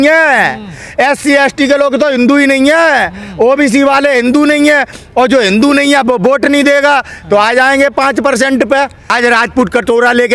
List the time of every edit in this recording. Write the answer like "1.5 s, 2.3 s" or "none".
9.1 s